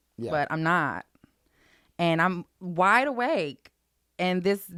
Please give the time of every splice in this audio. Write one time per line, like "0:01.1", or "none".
none